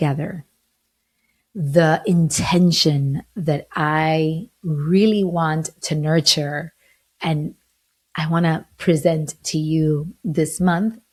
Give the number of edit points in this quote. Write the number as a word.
zero